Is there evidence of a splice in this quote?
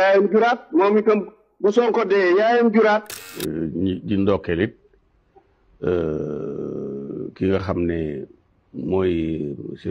yes; 1 cut; at 3.3 s

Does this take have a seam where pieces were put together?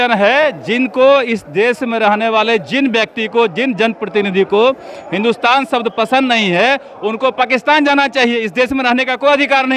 no; 0 cuts

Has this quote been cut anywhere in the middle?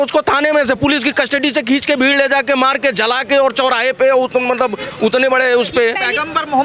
no; 0 cuts

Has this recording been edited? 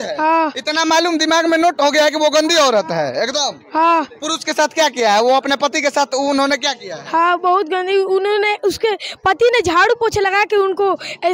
no; 0 cuts

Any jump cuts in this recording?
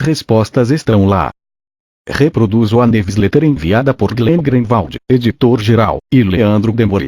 yes; 1 cut; at 1.9 s

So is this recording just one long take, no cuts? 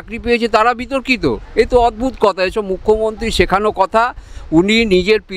yes; 0 cuts

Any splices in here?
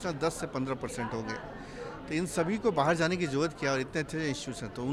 no; 0 cuts

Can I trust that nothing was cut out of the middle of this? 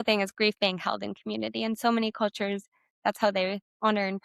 yes; 0 cuts

